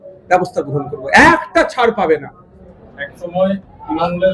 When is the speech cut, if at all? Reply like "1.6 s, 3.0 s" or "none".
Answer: none